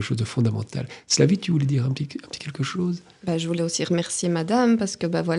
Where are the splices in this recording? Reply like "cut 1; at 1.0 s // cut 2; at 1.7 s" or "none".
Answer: none